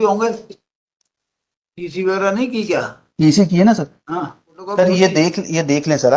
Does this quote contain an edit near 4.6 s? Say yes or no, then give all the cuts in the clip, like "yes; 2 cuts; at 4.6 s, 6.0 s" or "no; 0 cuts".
yes; 1 cut; at 4.6 s